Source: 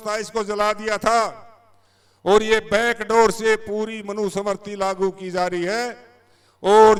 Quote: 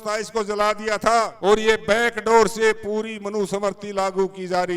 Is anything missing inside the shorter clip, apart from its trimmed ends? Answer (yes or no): yes